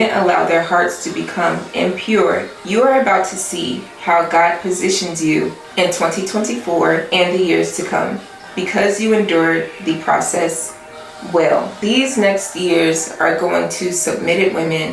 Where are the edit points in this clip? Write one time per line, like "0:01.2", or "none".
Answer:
0:02.5
0:05.6
0:07.1